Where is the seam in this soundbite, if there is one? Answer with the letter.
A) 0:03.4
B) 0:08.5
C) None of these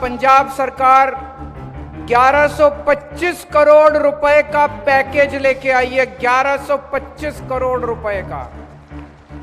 B